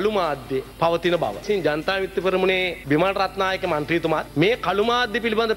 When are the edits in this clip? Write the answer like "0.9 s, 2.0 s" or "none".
1.4 s